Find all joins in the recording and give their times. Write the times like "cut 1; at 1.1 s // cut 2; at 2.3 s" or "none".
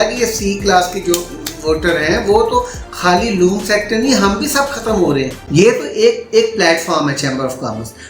cut 1; at 5.4 s